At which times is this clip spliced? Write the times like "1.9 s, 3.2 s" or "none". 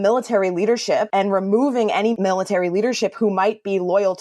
1.1 s